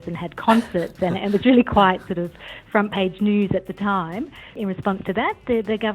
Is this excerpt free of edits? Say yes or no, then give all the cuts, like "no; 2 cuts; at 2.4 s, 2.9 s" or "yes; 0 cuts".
no; 1 cut; at 4.5 s